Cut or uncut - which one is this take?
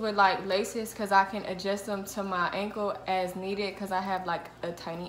uncut